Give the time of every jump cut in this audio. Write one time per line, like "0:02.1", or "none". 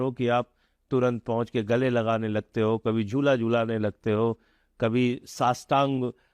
none